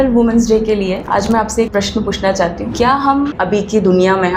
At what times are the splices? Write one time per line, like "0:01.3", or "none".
0:01.0
0:01.7
0:02.6
0:03.3